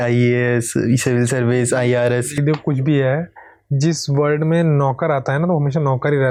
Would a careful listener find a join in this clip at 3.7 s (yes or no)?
no